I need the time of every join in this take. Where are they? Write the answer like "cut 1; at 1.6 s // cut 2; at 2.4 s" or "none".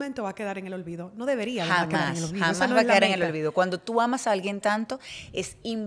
none